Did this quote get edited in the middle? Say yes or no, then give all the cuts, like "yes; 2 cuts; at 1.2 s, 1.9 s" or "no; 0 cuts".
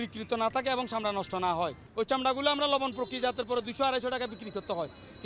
yes; 1 cut; at 1.8 s